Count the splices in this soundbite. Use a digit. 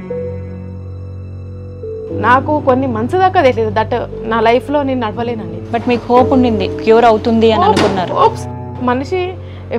1